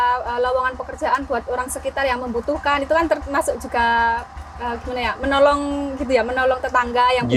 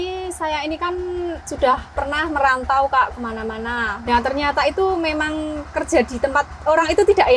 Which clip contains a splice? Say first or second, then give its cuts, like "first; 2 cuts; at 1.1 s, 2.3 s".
second; 2 cuts; at 1.5 s, 3.9 s